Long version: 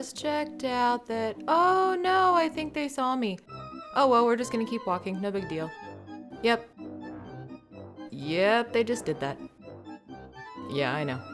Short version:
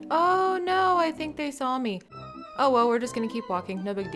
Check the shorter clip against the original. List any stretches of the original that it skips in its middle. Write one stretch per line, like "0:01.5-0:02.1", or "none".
none